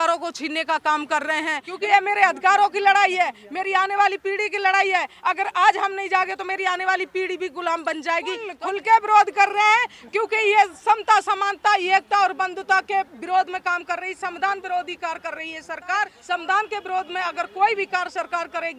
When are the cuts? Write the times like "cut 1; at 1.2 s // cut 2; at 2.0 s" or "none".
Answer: cut 1; at 1.6 s // cut 2; at 8.5 s // cut 3; at 16.2 s

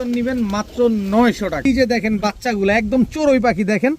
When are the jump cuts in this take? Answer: cut 1; at 1.6 s

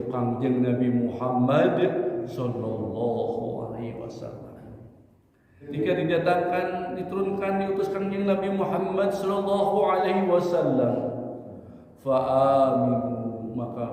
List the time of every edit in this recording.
cut 1; at 5.7 s

